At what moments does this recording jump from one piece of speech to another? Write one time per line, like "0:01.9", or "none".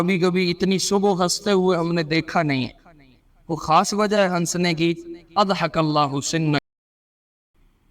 0:07.0